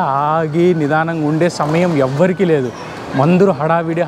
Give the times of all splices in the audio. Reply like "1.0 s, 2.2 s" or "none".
none